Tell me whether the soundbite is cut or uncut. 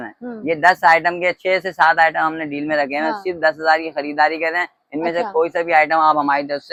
uncut